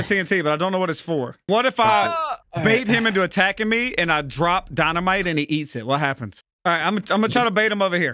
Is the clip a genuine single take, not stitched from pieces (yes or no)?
no